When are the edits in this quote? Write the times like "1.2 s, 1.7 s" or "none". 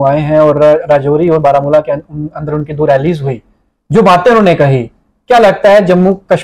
none